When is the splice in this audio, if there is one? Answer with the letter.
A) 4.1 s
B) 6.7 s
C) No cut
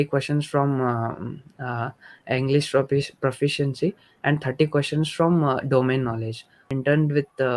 B